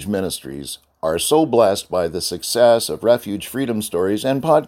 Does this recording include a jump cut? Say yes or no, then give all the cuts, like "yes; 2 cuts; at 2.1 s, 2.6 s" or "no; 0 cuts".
no; 0 cuts